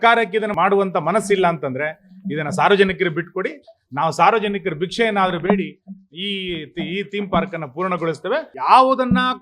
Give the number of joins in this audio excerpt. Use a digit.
1